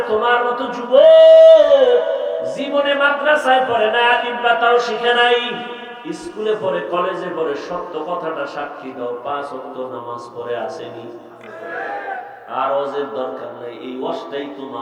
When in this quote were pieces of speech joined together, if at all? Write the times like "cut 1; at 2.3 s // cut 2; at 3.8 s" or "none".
cut 1; at 2.6 s // cut 2; at 5.9 s